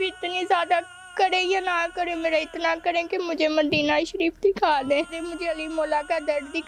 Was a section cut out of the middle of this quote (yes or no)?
yes